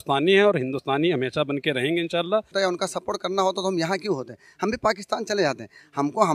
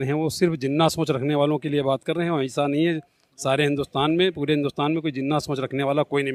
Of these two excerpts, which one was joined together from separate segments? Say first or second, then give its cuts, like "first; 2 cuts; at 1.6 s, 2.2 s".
first; 1 cut; at 2.5 s